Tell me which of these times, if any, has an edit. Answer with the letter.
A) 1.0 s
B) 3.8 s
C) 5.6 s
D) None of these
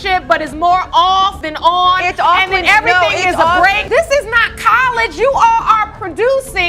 B